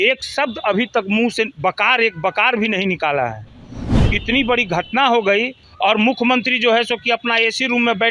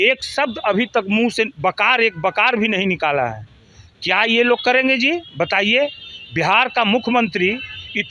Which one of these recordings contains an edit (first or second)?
first